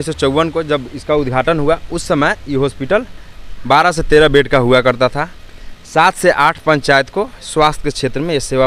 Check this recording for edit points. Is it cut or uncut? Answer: uncut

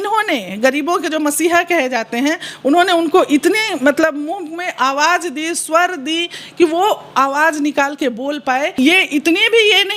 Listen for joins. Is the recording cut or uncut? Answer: cut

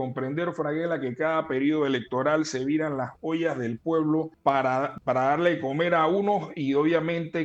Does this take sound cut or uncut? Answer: cut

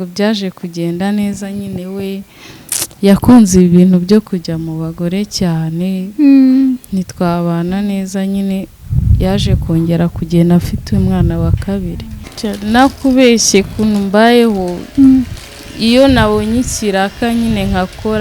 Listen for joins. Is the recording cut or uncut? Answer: cut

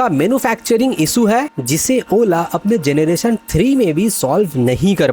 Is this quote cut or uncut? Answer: uncut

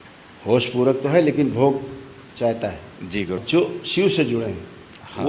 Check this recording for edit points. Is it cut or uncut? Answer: cut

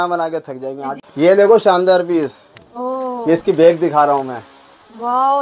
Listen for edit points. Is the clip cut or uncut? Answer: cut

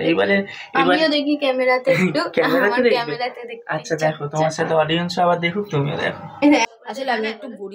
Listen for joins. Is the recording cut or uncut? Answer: cut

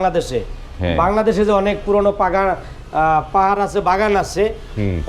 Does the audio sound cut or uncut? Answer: uncut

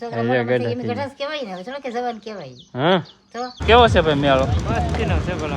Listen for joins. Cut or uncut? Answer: cut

